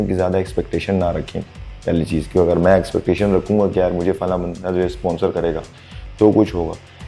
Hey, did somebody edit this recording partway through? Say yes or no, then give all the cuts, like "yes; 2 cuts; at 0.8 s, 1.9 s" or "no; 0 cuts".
no; 0 cuts